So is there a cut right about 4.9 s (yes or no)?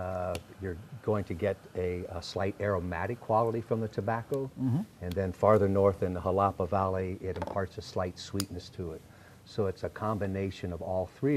no